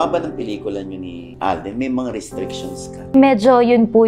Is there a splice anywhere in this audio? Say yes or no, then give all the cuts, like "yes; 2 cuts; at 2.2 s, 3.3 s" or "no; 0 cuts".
yes; 1 cut; at 3.1 s